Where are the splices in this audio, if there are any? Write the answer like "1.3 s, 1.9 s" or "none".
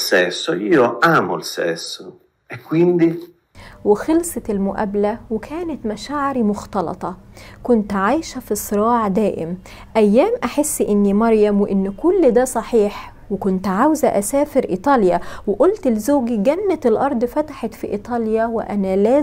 none